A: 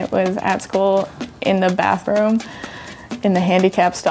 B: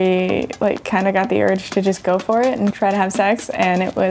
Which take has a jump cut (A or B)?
B